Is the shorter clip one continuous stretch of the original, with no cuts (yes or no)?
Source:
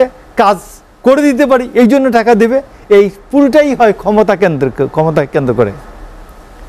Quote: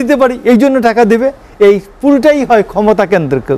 yes